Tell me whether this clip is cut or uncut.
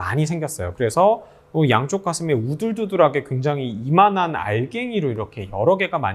uncut